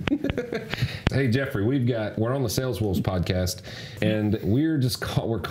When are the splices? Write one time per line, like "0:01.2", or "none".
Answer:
0:01.1
0:03.8